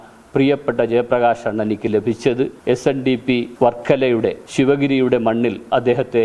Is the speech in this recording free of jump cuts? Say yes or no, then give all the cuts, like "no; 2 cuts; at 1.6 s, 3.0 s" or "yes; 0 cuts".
no; 3 cuts; at 2.6 s, 3.5 s, 4.4 s